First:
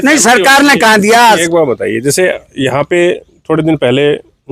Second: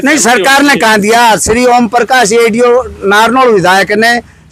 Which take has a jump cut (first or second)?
first